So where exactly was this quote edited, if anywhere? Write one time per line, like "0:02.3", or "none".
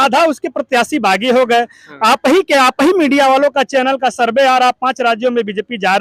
none